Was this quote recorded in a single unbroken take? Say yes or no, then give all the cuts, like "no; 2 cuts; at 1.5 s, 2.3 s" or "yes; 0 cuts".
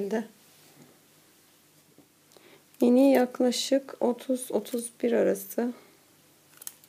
no; 1 cut; at 2.2 s